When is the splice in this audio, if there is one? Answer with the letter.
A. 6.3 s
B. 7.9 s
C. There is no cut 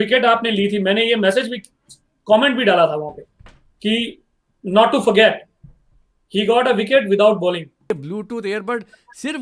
B